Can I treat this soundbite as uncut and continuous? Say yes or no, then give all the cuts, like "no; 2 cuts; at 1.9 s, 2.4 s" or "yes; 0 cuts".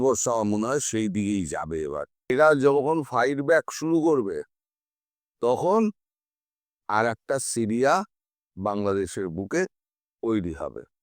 no; 1 cut; at 2.1 s